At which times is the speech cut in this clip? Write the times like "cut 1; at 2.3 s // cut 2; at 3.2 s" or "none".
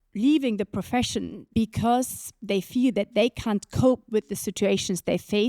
cut 1; at 1.4 s